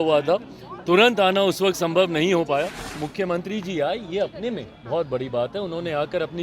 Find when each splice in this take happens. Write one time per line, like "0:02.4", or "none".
0:03.0